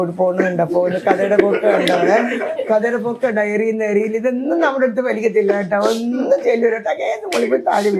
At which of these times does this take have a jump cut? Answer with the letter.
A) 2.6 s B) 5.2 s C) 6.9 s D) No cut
D